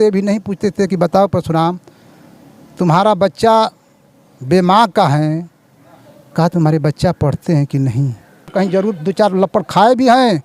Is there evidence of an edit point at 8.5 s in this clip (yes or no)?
yes